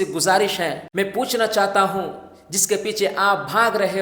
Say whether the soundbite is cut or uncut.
uncut